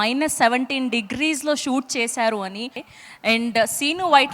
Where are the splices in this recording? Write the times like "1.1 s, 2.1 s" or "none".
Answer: 2.9 s

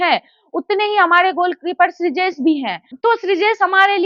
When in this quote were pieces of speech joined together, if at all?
2.9 s

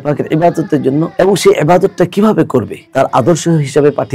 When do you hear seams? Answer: 1.1 s, 2.8 s

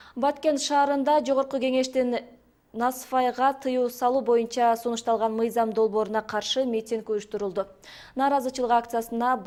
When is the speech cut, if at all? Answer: none

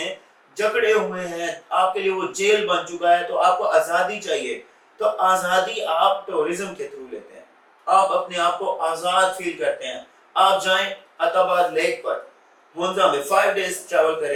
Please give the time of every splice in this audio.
none

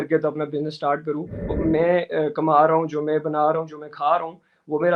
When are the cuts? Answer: 1.6 s

